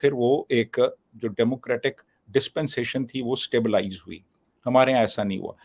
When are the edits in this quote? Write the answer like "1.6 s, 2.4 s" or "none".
none